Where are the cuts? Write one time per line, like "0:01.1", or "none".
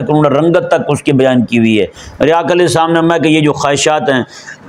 0:02.0